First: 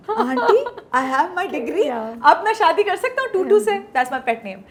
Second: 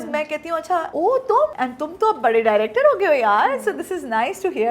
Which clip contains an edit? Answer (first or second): second